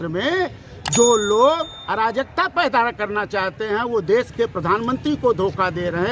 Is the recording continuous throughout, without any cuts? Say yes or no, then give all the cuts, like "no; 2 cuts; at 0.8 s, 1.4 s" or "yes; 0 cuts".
yes; 0 cuts